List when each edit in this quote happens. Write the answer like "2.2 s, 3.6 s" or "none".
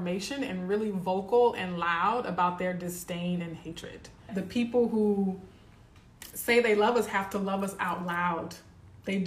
4.3 s